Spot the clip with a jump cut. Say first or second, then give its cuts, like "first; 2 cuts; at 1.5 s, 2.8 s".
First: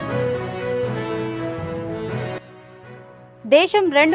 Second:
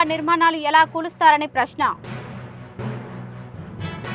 first; 1 cut; at 2.4 s